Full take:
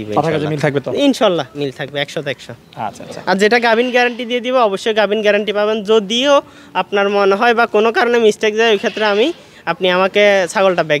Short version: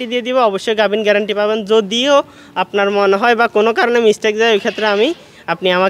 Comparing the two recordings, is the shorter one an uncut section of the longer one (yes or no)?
yes